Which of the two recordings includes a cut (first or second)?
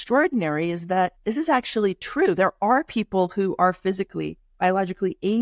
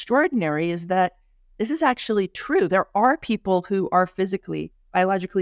first